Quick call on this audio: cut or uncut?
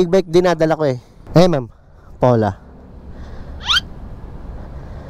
cut